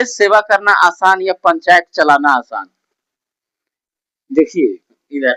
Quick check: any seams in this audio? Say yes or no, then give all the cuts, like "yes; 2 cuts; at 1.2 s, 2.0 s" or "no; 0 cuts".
no; 0 cuts